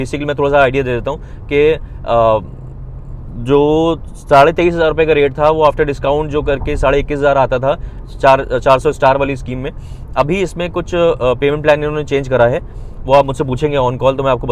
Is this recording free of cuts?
yes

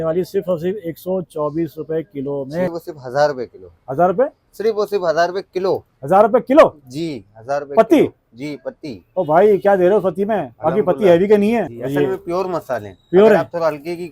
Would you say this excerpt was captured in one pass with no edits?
no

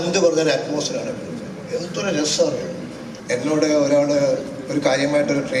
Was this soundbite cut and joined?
yes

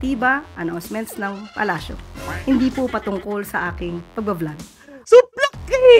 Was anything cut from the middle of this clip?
no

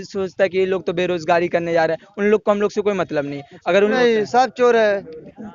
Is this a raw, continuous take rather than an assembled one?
no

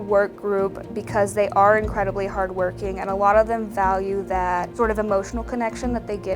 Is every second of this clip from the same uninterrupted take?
no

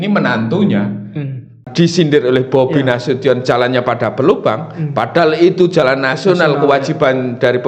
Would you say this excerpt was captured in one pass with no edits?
no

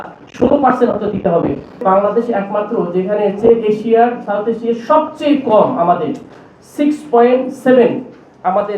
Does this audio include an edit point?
yes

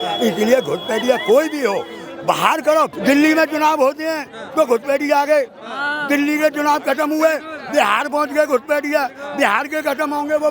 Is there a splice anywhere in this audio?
yes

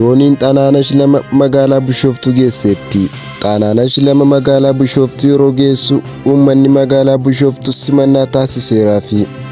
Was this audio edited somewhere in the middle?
no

